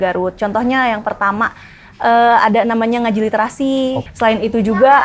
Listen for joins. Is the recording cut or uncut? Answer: cut